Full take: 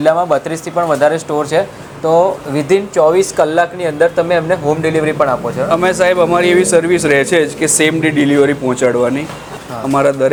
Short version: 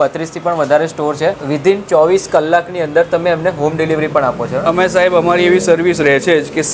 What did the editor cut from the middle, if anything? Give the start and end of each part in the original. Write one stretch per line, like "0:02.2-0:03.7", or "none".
0:01.7-0:02.5